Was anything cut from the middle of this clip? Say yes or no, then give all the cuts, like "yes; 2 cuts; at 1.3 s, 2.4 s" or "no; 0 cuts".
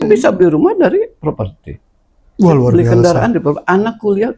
no; 0 cuts